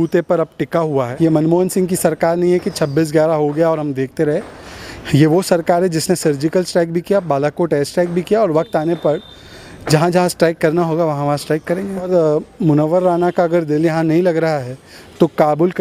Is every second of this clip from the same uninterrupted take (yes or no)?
no